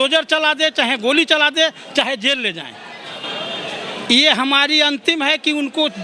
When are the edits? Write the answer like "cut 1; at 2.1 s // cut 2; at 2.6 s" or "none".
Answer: none